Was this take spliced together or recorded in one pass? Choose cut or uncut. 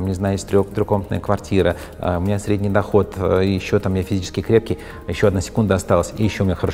uncut